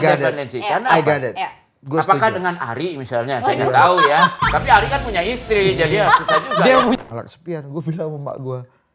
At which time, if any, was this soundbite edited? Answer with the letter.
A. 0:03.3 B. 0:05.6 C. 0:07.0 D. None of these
C